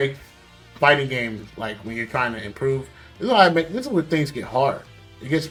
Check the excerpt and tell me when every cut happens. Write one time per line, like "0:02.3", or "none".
none